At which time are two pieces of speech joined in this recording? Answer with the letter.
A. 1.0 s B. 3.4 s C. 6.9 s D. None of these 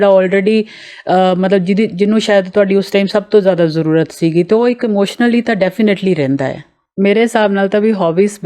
C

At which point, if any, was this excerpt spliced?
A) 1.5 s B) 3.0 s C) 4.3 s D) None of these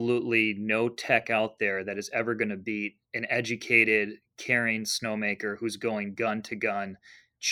B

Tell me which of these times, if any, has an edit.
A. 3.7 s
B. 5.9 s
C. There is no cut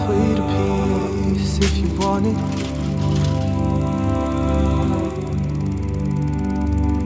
C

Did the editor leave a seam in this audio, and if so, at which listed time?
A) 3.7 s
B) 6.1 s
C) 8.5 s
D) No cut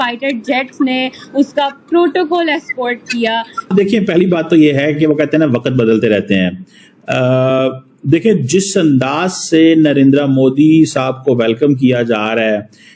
A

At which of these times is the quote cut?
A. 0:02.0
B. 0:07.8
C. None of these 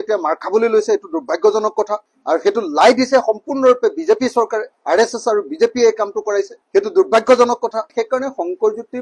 B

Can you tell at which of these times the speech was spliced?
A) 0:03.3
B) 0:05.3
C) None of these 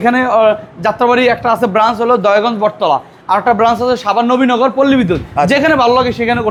C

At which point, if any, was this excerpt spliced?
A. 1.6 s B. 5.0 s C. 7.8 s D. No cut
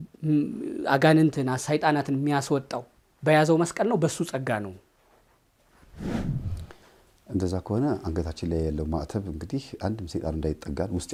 D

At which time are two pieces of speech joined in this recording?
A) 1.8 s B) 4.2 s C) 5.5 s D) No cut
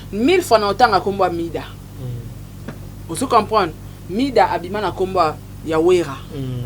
D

